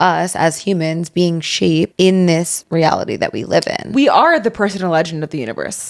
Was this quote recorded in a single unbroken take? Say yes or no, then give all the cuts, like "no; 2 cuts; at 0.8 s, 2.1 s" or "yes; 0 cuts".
no; 3 cuts; at 1.9 s, 2.6 s, 3.8 s